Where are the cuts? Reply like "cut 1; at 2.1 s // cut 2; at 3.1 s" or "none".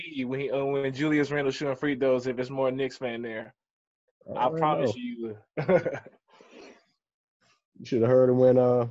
none

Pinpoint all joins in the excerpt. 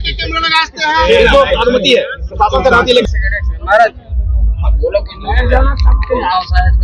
cut 1; at 3.0 s

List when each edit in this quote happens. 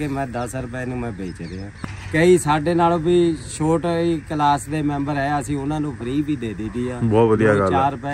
cut 1; at 1.7 s

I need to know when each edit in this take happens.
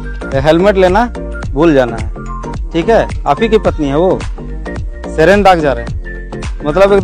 none

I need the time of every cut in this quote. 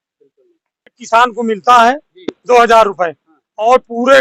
cut 1; at 1.0 s

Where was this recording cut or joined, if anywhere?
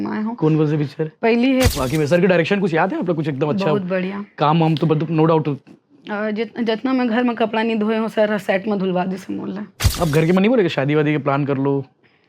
cut 1; at 1.7 s // cut 2; at 9.8 s

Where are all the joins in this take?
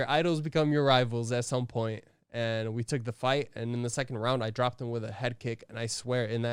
none

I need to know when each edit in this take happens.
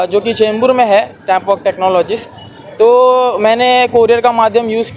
none

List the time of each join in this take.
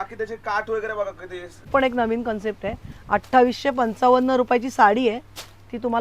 cut 1; at 1.7 s

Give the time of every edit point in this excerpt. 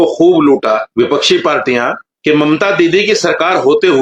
cut 1; at 2.1 s

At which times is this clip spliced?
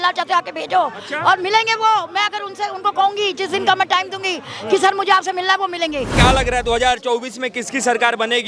cut 1; at 6.2 s

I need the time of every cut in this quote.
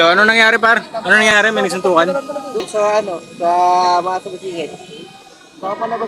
cut 1; at 1.3 s // cut 2; at 2.6 s

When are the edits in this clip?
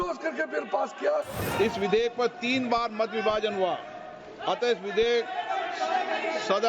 cut 1; at 1.4 s

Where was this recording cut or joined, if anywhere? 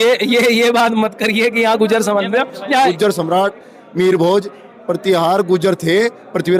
cut 1; at 2.9 s

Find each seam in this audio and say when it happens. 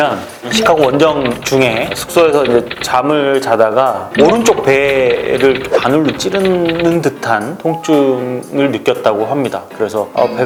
none

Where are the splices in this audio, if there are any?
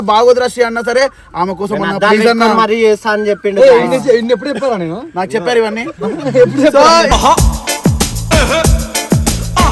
none

